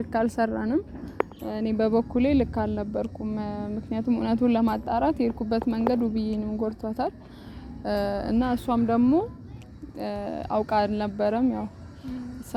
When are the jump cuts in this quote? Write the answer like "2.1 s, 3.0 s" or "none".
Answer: none